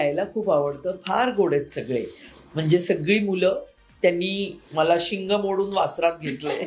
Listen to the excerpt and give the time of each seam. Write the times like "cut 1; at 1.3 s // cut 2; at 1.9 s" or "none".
none